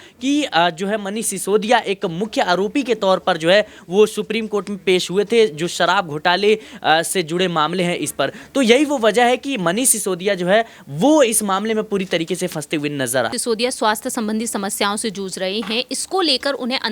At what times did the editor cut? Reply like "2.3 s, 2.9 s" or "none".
13.4 s